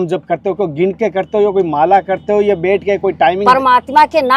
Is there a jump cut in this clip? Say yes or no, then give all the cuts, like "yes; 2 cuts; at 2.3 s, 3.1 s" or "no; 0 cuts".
no; 0 cuts